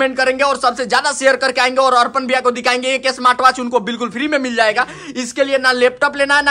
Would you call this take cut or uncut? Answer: uncut